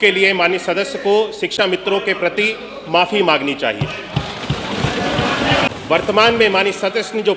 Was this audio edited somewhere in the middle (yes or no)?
yes